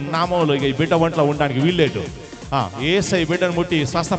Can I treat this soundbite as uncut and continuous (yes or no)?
yes